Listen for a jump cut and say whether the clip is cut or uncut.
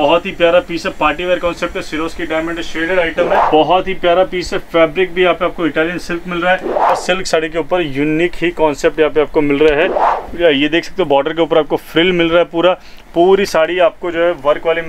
cut